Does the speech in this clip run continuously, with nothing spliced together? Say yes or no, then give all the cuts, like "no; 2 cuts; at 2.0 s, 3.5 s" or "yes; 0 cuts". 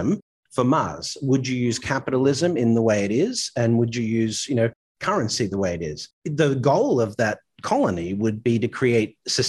yes; 0 cuts